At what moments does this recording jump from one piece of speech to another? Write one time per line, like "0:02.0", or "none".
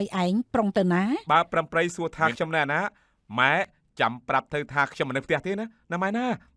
0:01.2